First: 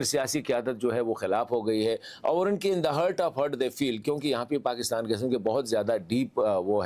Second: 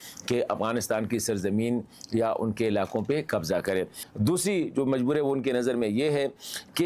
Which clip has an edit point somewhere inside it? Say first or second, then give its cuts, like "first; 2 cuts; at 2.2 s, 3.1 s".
second; 1 cut; at 4.0 s